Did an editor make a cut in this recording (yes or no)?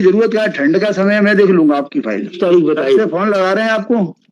yes